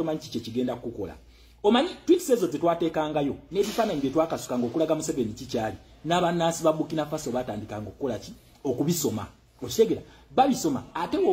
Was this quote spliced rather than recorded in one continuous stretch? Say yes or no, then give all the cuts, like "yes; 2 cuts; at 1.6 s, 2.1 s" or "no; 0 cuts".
yes; 1 cut; at 7.1 s